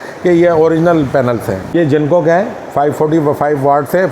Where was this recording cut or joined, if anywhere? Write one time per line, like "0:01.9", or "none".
0:01.6